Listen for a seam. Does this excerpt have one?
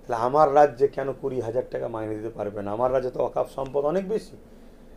no; 0 cuts

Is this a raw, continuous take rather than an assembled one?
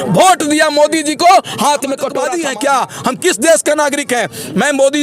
no; 1 cut; at 2.3 s

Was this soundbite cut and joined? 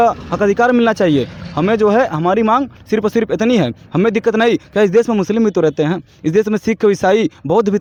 no; 0 cuts

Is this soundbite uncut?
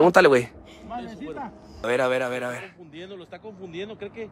no; 1 cut; at 1.8 s

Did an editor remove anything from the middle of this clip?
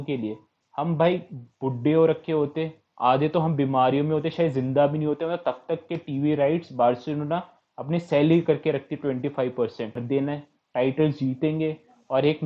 yes; 1 cut; at 10.0 s

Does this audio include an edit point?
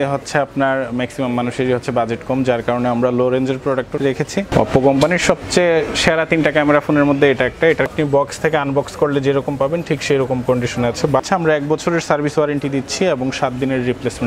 yes; 3 cuts; at 4.0 s, 7.9 s, 11.2 s

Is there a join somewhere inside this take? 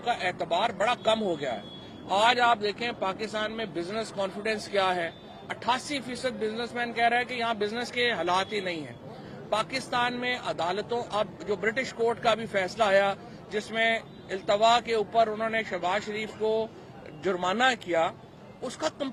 no; 0 cuts

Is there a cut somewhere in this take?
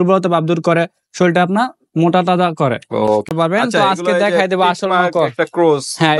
yes; 1 cut; at 3.3 s

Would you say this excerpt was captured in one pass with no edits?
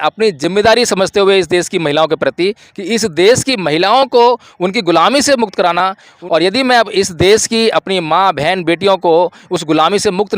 no; 1 cut; at 6.2 s

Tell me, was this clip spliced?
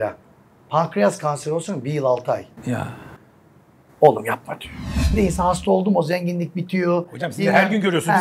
yes; 1 cut; at 5.1 s

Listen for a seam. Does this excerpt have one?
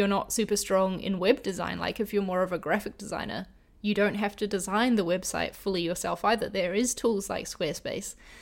no; 0 cuts

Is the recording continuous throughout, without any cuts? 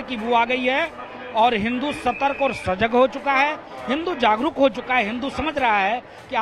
yes; 0 cuts

